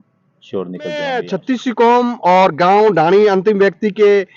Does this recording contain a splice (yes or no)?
yes